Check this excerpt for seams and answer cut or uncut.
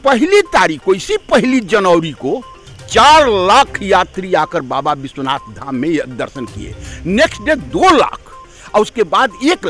uncut